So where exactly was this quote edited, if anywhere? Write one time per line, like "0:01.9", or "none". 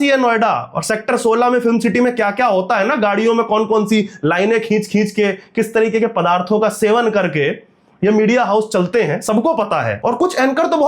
none